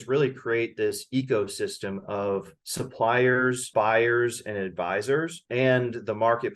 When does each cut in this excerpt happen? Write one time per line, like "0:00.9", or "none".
0:02.6
0:03.7
0:05.4